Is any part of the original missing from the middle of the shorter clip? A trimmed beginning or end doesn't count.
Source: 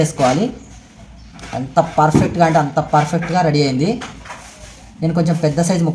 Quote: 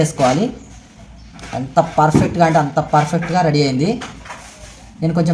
no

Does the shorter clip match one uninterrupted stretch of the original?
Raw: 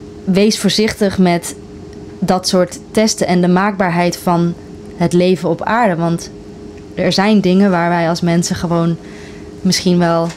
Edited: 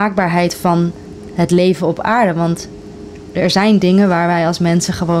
yes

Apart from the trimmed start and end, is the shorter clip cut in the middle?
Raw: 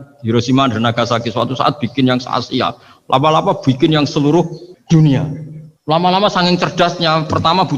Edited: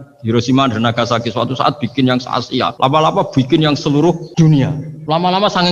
yes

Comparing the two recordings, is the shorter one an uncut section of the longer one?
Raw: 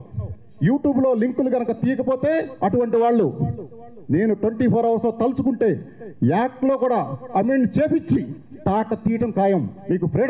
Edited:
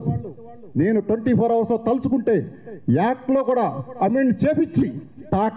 yes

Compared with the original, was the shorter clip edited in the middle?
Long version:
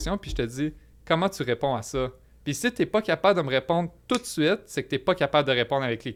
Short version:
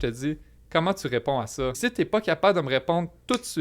yes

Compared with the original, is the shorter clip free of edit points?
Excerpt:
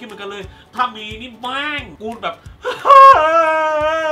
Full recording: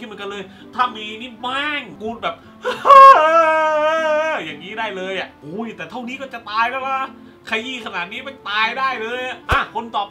yes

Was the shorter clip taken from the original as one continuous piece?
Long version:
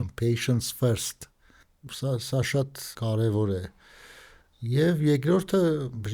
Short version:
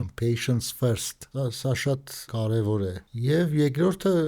no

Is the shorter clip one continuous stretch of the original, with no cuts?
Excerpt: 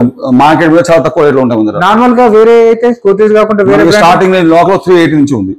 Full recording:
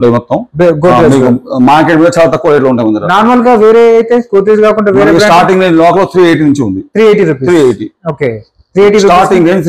yes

